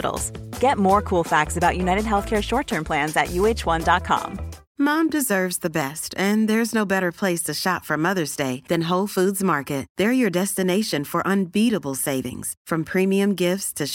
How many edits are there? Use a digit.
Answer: 1